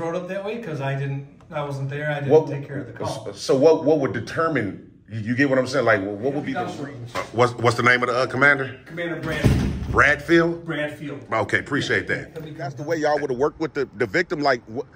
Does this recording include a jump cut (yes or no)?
yes